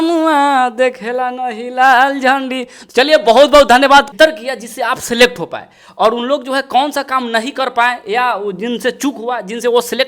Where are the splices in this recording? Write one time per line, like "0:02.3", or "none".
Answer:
0:04.1